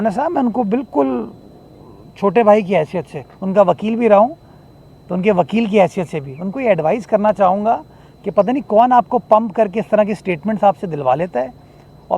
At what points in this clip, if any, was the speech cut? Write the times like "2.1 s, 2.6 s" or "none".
none